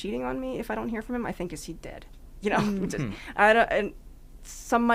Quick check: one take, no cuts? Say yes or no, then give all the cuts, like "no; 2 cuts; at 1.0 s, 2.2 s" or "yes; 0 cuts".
yes; 0 cuts